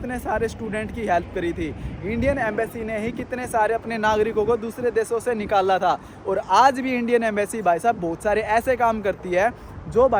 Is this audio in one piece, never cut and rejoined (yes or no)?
yes